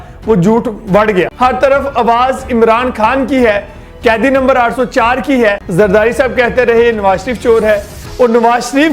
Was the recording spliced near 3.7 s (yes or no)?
no